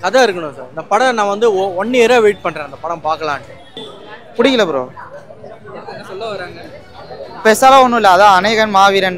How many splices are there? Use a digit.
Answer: 1